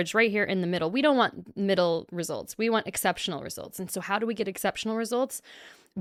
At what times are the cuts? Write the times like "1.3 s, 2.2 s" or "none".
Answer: none